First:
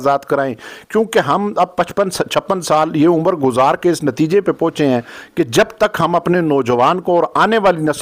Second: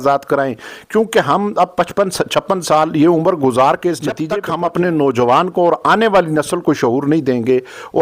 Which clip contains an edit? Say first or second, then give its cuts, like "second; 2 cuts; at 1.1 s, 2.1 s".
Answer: second; 1 cut; at 4.3 s